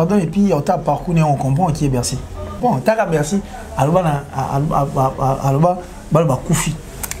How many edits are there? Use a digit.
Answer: 1